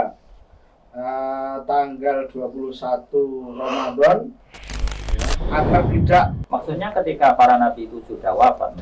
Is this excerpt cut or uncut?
cut